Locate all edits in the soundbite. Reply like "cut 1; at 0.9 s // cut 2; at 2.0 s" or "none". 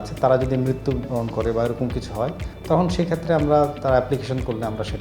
cut 1; at 2.5 s